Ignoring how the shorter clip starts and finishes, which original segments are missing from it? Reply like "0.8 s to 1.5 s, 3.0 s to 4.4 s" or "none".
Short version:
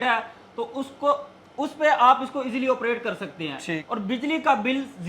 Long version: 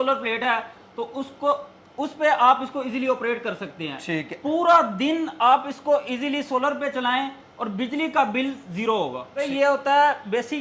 4.2 s to 7.5 s